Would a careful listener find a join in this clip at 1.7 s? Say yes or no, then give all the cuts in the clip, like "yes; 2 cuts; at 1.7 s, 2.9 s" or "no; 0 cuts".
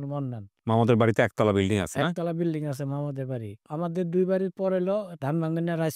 no; 2 cuts; at 3.7 s, 5.2 s